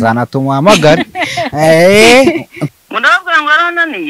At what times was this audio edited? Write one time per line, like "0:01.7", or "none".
0:02.5